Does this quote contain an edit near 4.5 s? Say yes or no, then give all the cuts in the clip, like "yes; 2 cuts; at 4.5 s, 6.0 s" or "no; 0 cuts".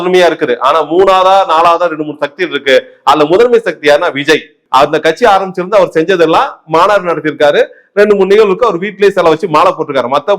yes; 1 cut; at 4.5 s